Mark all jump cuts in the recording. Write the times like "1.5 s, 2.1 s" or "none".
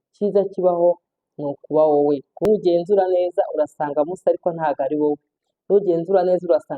2.3 s